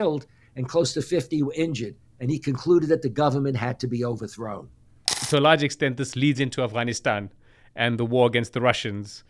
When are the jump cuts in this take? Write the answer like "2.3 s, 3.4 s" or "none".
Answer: 5.2 s